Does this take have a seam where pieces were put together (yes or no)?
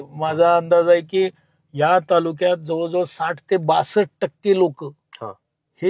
no